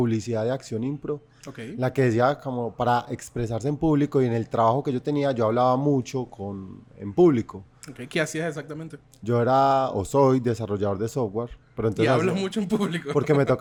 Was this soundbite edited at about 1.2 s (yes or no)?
no